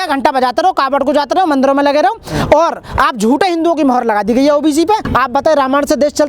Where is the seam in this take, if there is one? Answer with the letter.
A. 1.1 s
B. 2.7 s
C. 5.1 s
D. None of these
C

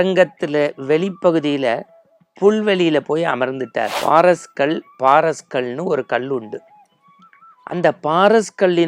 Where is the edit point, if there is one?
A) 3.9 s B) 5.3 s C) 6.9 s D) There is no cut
A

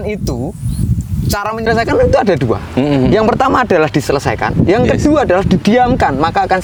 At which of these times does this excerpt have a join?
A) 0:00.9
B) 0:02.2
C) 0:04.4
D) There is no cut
D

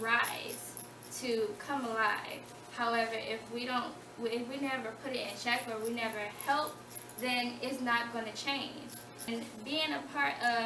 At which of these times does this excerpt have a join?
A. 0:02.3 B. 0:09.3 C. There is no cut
B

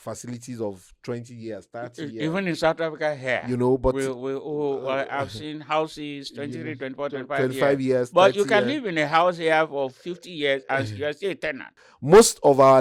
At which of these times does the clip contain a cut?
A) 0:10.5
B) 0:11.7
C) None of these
B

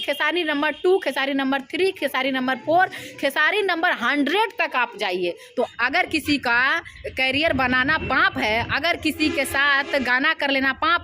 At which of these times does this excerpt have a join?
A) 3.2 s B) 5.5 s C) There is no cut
B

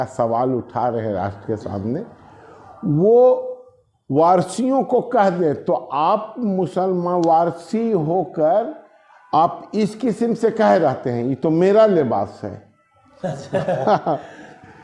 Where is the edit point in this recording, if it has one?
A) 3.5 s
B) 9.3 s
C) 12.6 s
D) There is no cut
D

